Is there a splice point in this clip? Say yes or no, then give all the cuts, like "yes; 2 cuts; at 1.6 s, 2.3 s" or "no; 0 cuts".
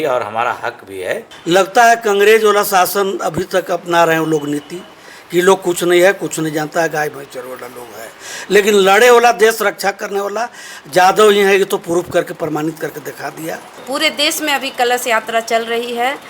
yes; 2 cuts; at 1.3 s, 13.8 s